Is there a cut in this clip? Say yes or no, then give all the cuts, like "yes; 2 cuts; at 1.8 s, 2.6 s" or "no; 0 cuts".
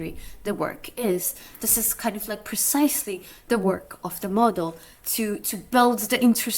no; 0 cuts